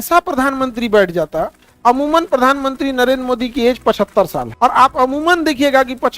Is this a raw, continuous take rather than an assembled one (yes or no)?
no